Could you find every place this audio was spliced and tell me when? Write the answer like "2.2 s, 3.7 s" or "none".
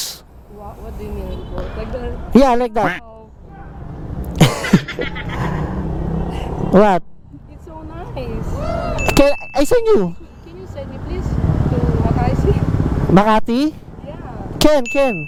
none